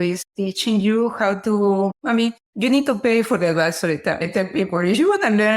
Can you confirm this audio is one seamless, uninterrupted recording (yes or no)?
no